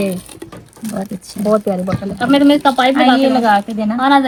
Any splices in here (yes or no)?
no